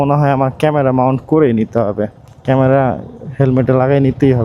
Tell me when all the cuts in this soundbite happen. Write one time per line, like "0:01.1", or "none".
0:02.3